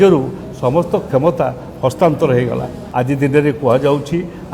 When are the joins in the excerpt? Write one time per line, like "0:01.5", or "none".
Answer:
0:02.8